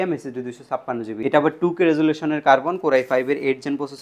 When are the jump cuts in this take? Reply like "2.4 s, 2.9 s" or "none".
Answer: 1.1 s